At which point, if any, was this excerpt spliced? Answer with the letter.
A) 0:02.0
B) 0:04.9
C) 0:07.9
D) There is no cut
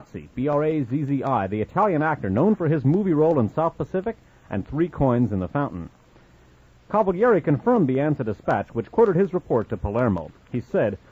A